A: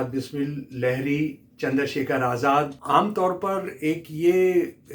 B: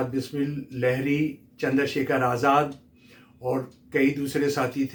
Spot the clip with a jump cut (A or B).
A